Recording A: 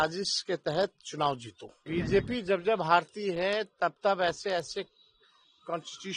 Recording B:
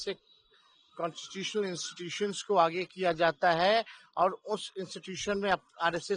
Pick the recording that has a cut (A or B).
A